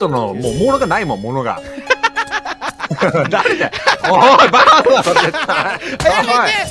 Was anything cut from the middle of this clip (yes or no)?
no